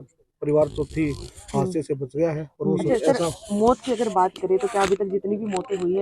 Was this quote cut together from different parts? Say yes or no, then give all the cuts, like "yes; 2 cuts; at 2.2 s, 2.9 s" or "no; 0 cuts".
yes; 1 cut; at 2.9 s